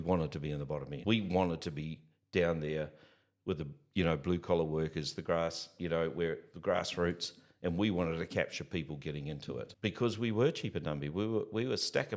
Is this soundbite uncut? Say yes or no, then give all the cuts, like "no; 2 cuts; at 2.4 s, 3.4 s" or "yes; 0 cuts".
no; 2 cuts; at 1.0 s, 9.7 s